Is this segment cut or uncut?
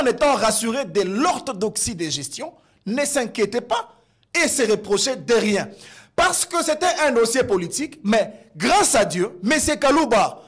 uncut